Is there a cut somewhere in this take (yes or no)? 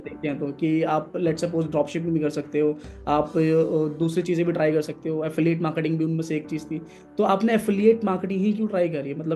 no